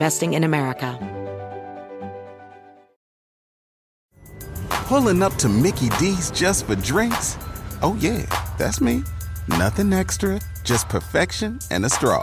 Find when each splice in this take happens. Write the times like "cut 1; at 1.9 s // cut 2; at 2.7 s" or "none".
cut 1; at 0.9 s